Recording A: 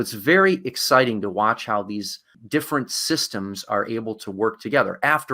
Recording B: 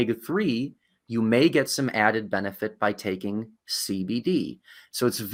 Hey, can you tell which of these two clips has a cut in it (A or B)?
A